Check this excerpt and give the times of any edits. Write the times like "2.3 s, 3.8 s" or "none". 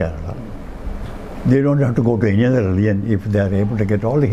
none